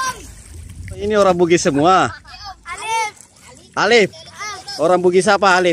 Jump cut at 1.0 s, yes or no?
yes